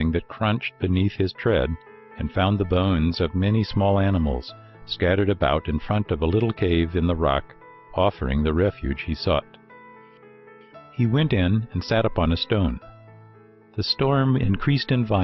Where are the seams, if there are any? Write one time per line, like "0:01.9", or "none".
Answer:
none